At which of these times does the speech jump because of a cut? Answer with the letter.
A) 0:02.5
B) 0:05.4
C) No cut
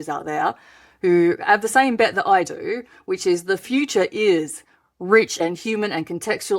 B